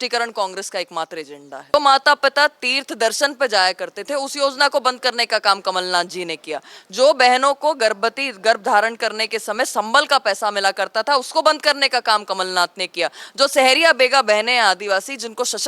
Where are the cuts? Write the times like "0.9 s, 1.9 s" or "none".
1.7 s